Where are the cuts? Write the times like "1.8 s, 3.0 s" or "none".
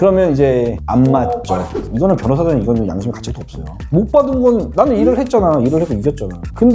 1.8 s